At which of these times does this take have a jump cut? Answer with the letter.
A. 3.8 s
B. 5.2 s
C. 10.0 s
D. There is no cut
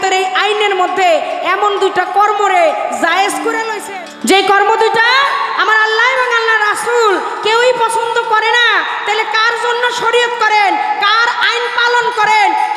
A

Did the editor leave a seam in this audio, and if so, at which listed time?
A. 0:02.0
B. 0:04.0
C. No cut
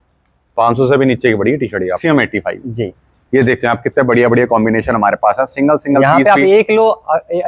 A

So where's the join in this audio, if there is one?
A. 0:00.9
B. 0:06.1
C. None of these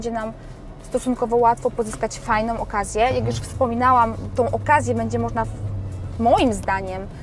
C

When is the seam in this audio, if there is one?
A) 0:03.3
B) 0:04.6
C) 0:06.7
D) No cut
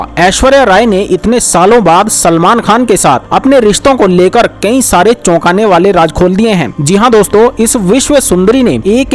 C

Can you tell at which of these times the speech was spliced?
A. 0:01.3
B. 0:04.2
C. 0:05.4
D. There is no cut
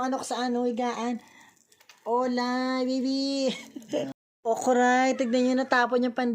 B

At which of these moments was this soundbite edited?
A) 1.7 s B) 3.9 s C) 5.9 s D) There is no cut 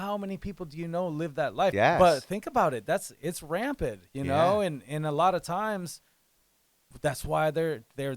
A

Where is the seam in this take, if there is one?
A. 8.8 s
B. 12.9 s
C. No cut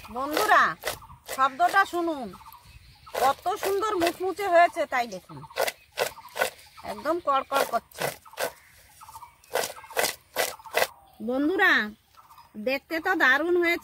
C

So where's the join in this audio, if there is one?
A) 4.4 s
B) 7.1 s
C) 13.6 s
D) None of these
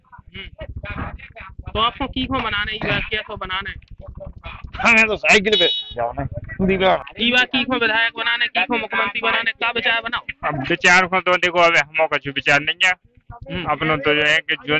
B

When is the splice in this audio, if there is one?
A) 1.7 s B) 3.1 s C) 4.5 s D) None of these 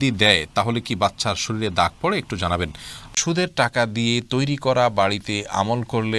B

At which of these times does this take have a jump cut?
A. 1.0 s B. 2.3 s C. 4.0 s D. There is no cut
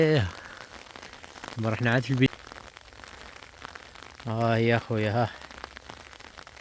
B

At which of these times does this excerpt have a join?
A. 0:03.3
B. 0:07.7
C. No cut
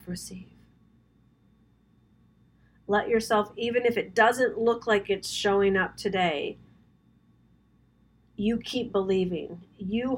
C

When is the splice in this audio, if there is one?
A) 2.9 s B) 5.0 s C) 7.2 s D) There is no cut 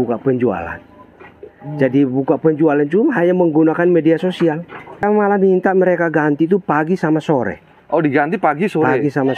B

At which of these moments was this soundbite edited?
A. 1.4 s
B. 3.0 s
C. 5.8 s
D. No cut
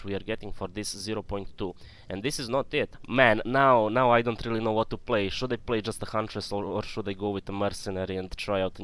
B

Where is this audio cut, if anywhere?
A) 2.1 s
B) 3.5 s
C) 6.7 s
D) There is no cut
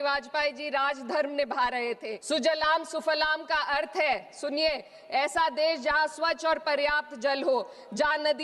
A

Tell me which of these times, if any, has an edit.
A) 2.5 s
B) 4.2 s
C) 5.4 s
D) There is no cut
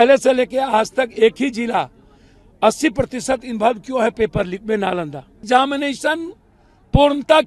C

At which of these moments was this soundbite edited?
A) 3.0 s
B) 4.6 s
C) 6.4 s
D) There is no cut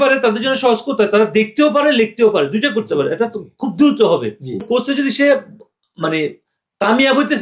B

